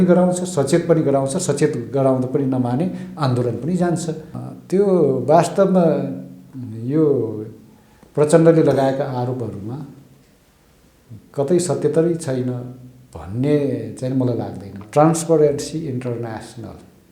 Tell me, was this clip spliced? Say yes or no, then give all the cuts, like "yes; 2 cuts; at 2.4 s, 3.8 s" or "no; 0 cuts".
yes; 2 cuts; at 4.3 s, 14.7 s